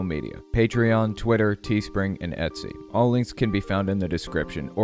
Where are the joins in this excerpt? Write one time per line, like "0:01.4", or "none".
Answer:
none